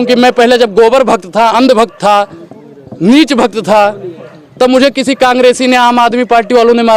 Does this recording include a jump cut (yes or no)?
no